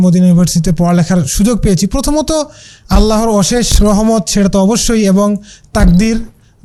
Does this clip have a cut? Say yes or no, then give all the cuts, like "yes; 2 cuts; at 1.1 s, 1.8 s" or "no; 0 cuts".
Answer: no; 0 cuts